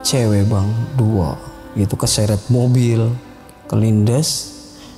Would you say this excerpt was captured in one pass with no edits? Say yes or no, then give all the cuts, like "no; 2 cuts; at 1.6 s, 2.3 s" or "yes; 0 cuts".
yes; 0 cuts